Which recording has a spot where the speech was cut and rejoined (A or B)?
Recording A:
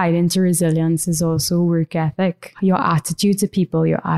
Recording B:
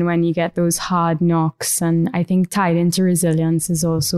A